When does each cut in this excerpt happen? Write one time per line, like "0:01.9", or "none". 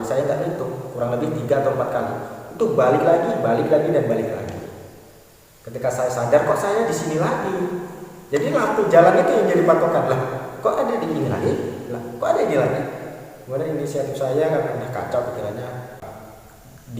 0:16.1